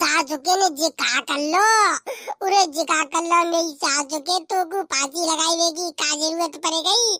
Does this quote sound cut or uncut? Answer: uncut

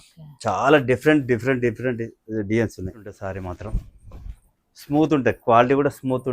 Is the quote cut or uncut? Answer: cut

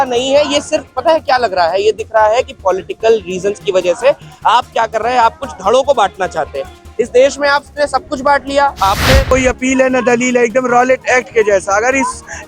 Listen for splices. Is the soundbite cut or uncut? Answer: cut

